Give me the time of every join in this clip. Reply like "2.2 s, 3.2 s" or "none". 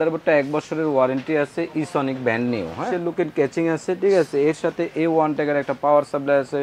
2.9 s